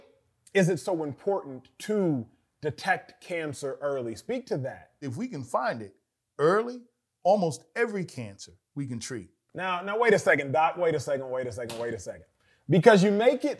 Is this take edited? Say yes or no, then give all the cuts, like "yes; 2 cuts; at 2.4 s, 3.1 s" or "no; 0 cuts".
no; 0 cuts